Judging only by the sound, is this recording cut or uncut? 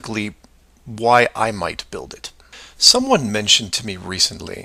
uncut